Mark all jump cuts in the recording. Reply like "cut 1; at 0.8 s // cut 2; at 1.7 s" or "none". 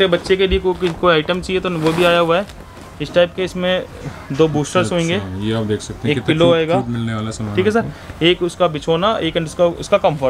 none